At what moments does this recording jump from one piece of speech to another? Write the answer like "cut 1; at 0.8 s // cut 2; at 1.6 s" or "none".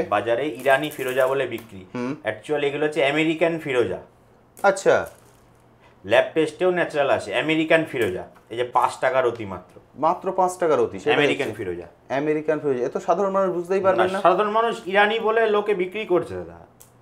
none